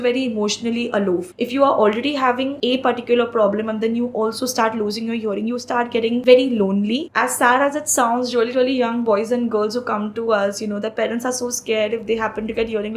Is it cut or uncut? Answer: cut